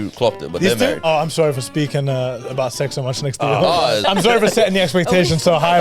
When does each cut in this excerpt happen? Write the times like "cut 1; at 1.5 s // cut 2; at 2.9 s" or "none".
cut 1; at 1.0 s // cut 2; at 4.0 s